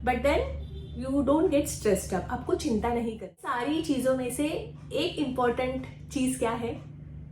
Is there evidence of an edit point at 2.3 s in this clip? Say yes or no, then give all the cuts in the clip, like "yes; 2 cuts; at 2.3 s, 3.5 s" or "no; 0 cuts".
no; 1 cut; at 3.6 s